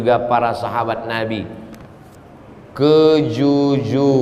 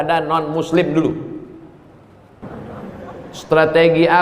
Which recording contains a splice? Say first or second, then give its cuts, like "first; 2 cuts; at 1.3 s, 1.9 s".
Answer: second; 1 cut; at 2.4 s